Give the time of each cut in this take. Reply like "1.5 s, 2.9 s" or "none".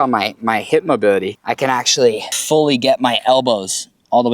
1.4 s, 2.3 s